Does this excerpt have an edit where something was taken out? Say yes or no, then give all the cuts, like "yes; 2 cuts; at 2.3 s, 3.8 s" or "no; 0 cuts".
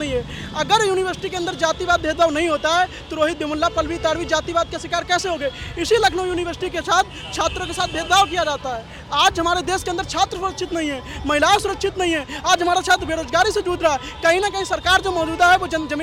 no; 0 cuts